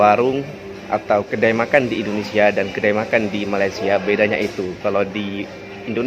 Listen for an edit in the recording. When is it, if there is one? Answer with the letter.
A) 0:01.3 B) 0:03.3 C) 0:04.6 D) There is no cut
A